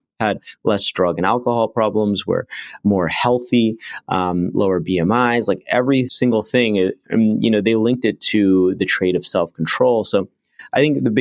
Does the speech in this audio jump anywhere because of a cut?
yes; 1 cut; at 6.1 s

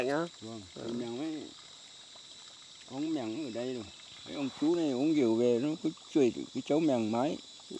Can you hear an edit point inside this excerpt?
yes; 1 cut; at 4.0 s

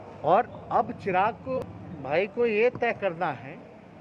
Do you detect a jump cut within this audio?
yes; 1 cut; at 1.6 s

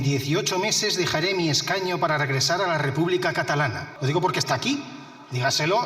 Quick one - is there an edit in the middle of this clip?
yes; 1 cut; at 3.9 s

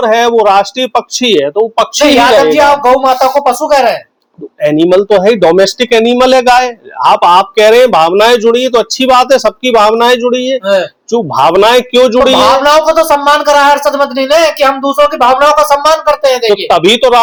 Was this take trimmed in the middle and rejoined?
no; 0 cuts

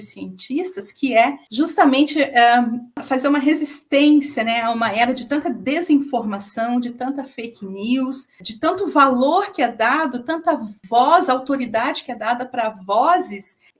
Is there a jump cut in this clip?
yes; 1 cut; at 1.4 s

